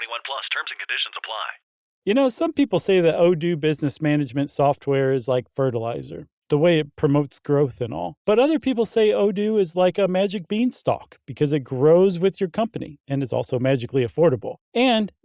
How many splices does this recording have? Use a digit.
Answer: 1